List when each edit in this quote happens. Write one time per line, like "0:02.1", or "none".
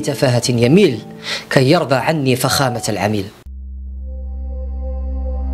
0:03.2